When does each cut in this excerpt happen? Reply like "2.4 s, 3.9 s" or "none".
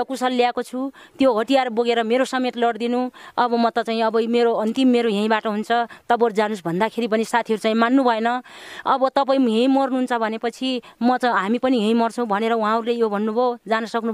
none